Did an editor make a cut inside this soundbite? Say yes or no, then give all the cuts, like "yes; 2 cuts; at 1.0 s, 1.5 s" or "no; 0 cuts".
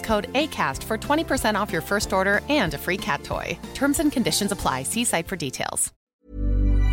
yes; 1 cut; at 6.0 s